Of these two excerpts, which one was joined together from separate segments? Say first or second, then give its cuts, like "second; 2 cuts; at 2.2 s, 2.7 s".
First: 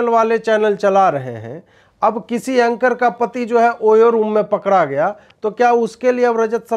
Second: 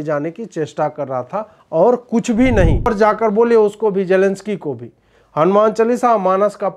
second; 1 cut; at 2.9 s